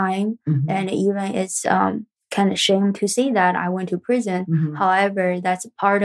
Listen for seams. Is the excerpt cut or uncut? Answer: cut